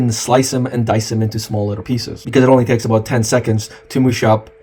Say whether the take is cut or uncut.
cut